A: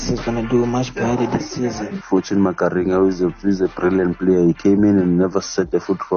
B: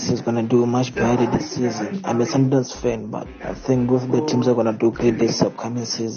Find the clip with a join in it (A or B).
A